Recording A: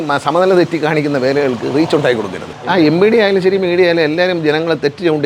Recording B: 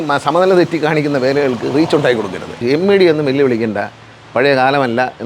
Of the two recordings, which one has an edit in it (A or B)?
B